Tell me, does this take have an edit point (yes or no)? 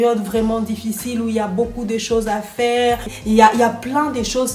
yes